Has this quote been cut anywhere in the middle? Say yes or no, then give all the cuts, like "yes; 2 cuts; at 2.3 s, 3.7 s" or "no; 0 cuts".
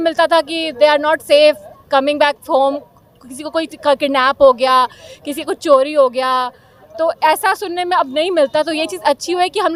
no; 0 cuts